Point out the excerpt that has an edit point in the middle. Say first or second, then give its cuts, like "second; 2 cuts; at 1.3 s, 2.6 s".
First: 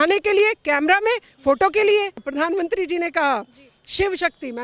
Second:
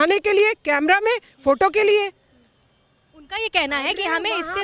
first; 1 cut; at 2.3 s